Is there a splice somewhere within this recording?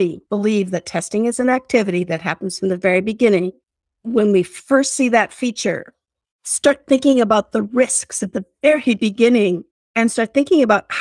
yes; 1 cut; at 6.2 s

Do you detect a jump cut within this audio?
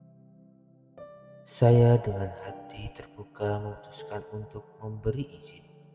yes; 1 cut; at 0.9 s

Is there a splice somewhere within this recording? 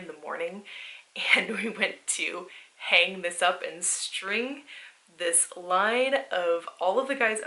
no; 0 cuts

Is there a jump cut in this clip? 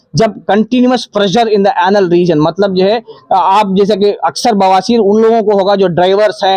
no; 0 cuts

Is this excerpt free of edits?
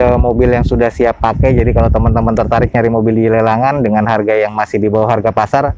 yes; 0 cuts

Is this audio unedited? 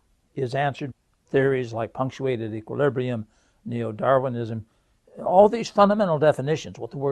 yes; 0 cuts

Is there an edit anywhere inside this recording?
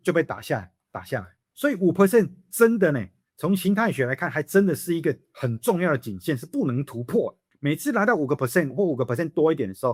no; 0 cuts

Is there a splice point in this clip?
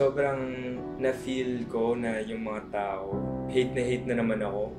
no; 0 cuts

